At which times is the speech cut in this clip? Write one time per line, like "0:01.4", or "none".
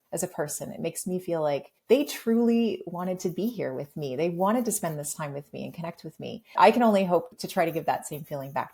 0:07.4